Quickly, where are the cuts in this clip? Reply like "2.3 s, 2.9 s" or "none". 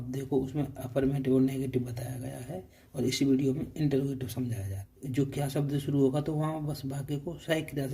5.0 s